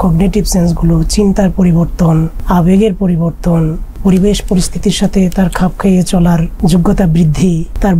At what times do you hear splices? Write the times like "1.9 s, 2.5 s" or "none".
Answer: 2.4 s, 4.0 s, 6.5 s